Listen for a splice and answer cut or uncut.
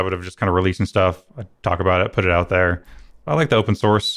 cut